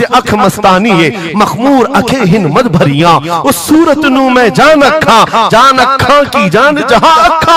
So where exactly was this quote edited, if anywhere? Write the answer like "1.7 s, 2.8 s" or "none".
none

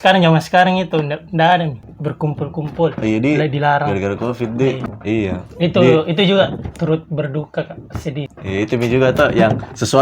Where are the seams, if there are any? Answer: 1.9 s, 4.9 s, 8.3 s

